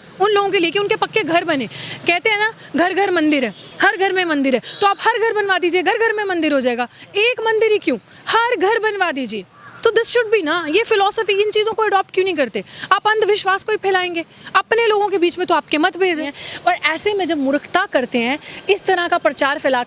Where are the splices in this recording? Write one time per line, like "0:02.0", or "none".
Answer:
none